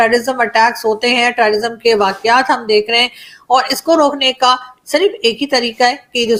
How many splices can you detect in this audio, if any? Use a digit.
0